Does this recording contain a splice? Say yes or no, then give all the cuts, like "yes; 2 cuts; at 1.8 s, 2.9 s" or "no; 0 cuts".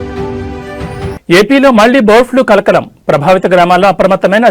yes; 1 cut; at 1.1 s